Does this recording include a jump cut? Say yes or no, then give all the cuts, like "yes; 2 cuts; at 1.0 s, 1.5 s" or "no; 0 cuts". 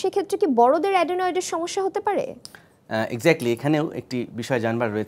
no; 0 cuts